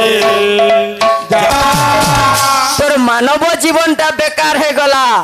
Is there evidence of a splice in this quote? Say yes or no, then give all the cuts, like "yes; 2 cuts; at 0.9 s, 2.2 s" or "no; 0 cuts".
yes; 1 cut; at 1.5 s